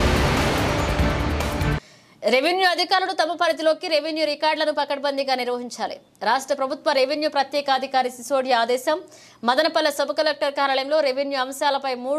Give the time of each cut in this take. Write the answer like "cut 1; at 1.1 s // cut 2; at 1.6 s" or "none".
cut 1; at 1.8 s